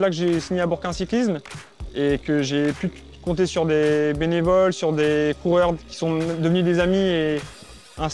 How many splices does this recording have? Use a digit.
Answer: 0